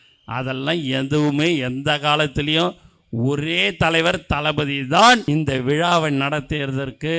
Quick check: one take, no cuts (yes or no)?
no